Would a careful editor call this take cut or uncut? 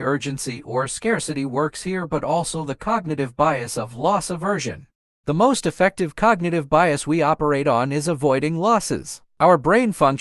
uncut